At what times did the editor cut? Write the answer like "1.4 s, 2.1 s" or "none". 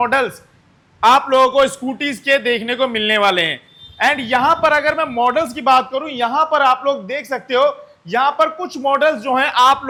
none